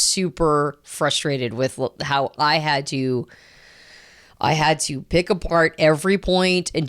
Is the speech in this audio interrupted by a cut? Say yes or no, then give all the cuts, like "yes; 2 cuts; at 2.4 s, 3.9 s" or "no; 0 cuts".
no; 0 cuts